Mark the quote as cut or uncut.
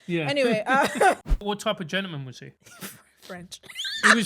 cut